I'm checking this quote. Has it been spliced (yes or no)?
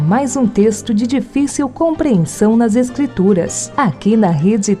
no